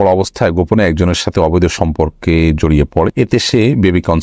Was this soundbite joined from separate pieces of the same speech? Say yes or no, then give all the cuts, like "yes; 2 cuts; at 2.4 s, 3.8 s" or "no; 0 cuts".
yes; 1 cut; at 3.1 s